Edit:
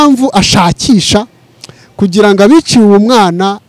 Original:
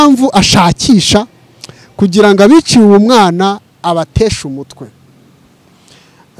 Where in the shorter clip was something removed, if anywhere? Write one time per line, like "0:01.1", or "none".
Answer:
none